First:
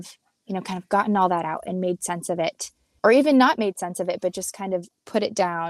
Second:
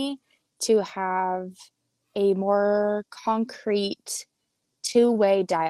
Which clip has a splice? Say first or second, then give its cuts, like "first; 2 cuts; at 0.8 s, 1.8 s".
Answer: first; 1 cut; at 2.9 s